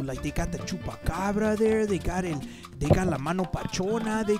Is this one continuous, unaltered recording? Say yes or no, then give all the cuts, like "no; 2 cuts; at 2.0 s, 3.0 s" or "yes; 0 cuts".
yes; 0 cuts